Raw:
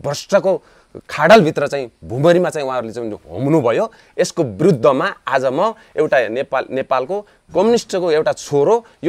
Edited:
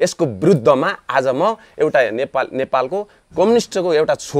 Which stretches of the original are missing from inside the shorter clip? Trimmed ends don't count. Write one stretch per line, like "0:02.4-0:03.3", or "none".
none

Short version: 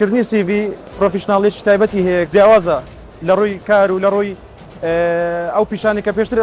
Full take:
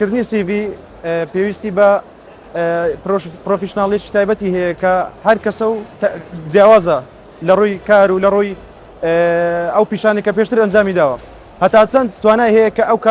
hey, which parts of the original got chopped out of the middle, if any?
0:00.9-0:03.3
0:04.8-0:06.5

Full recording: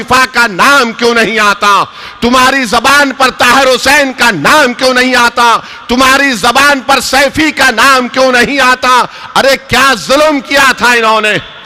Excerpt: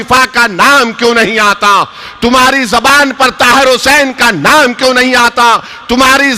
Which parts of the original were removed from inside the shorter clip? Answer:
none

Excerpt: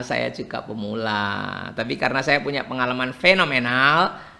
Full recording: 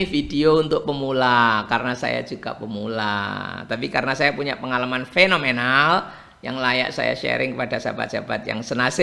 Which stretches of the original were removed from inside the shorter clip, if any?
none

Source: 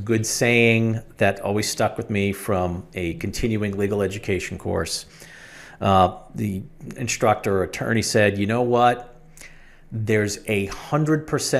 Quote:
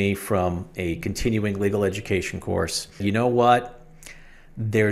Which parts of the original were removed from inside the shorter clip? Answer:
0:05.2-0:08.4

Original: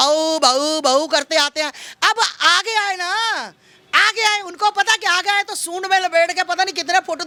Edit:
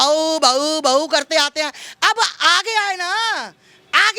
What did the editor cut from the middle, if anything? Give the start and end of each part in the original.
none

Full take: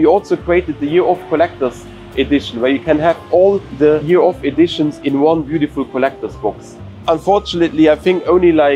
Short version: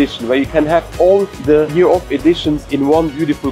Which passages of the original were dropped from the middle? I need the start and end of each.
none

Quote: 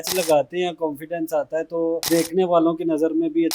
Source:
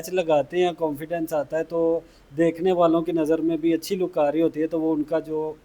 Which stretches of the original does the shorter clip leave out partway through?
0:02.0-0:02.3

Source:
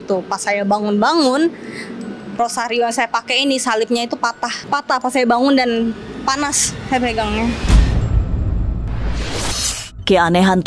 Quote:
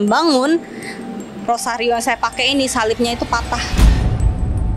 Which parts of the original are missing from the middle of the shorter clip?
0:04.6-0:07.6

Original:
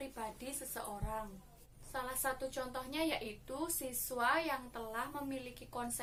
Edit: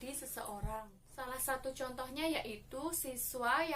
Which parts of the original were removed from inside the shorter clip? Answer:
0:01.4-0:01.8

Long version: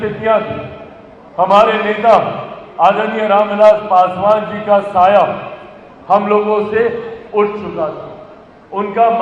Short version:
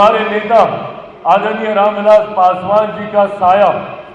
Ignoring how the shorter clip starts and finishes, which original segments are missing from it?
none

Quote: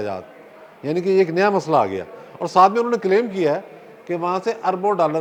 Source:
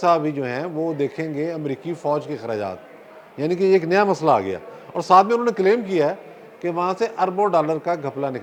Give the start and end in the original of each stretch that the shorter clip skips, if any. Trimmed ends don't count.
none

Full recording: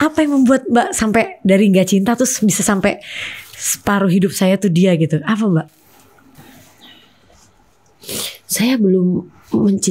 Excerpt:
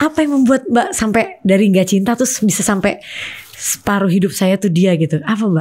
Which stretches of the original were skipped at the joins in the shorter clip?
none

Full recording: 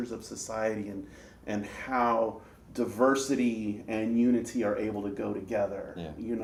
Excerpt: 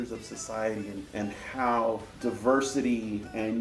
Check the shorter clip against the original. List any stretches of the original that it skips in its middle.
0:01.0-0:01.4
0:02.4-0:02.6

